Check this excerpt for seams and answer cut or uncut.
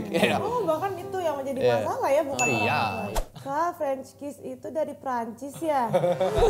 cut